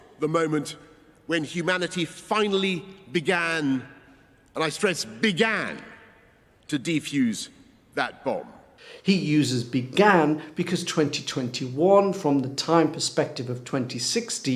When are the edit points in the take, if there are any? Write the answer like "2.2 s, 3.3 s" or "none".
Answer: none